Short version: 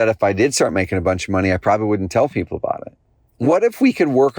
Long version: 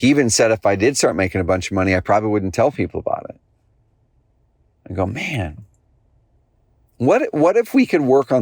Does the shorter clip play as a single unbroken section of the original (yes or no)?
no